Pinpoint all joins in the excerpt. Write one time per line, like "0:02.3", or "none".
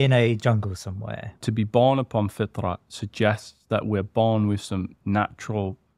0:01.4